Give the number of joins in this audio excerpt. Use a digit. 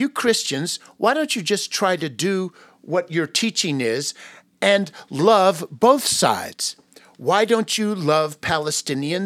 0